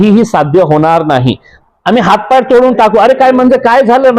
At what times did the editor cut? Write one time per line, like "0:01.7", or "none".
0:01.5